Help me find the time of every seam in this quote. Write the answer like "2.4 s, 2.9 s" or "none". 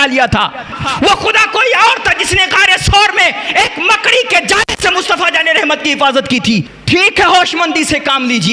6.7 s